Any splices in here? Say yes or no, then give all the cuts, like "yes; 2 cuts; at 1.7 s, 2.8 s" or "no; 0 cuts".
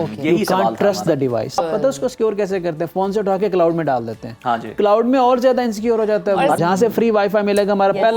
yes; 2 cuts; at 1.6 s, 6.6 s